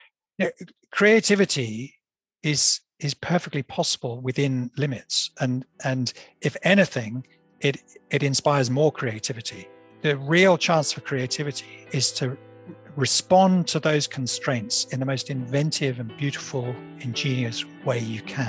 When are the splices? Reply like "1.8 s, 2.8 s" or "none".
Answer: 10.0 s

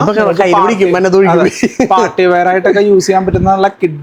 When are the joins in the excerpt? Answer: none

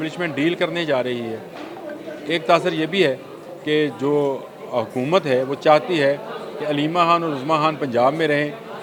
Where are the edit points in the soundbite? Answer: none

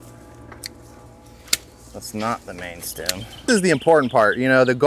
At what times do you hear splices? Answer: 3.4 s

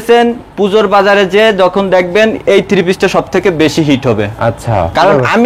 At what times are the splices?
none

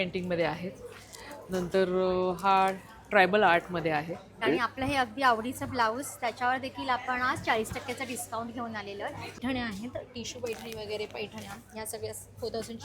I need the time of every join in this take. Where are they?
4.4 s, 9.4 s

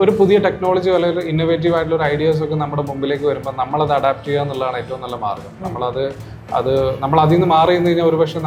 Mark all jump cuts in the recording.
none

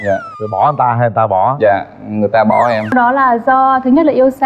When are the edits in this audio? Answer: 2.9 s

